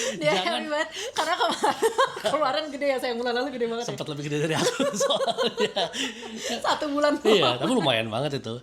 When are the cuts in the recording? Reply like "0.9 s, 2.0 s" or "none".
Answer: none

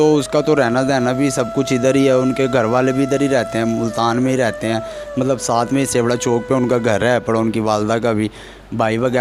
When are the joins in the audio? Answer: none

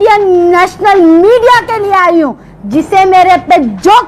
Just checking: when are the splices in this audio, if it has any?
none

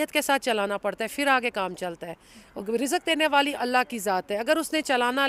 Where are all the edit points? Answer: none

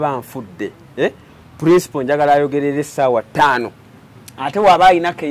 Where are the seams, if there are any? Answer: none

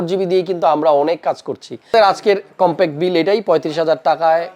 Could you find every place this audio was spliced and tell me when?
1.9 s

